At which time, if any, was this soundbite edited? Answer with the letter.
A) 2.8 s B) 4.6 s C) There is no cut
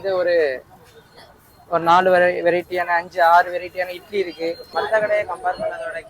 B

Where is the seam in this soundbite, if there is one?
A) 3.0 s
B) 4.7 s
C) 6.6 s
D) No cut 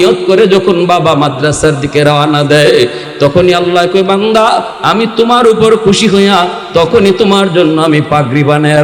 A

